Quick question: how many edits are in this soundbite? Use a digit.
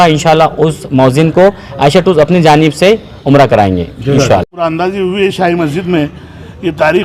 1